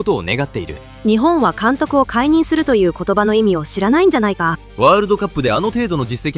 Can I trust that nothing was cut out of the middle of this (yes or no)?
no